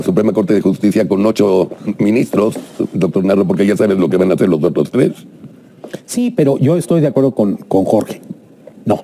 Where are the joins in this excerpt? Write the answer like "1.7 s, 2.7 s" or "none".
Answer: none